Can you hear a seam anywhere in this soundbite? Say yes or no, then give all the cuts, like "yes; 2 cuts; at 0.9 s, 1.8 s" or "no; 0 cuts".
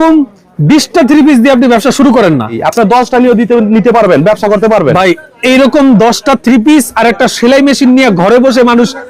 yes; 1 cut; at 2.6 s